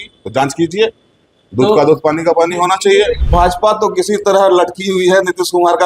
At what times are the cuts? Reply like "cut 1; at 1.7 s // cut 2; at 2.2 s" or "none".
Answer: cut 1; at 3.2 s